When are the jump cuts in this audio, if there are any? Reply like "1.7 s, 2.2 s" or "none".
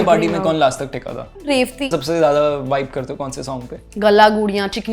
1.9 s